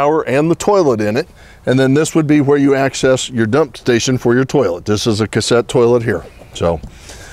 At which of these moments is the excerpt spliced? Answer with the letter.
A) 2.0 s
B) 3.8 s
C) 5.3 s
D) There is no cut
C